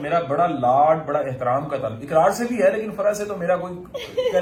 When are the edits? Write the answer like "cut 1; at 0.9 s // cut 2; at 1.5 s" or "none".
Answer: none